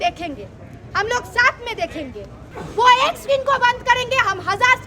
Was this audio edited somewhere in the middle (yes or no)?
yes